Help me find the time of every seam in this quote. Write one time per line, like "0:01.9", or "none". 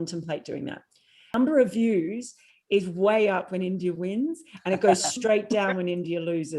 0:01.3